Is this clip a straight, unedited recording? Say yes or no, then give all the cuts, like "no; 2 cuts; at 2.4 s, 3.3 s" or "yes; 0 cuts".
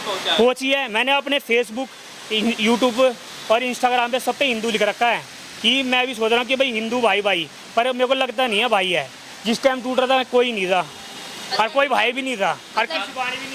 yes; 0 cuts